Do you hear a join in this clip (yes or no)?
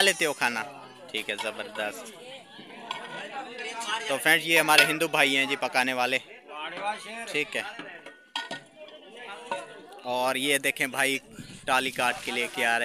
no